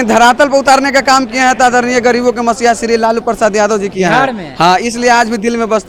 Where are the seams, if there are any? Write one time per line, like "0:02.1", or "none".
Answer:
none